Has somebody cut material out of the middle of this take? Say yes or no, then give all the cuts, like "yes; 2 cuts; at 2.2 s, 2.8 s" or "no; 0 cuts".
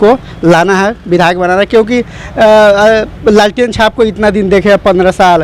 no; 0 cuts